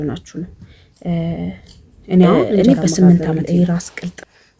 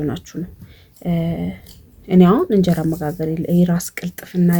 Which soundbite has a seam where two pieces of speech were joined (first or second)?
first